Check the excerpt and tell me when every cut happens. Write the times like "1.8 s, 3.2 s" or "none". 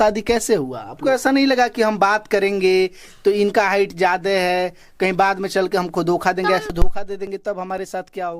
1.0 s, 7.0 s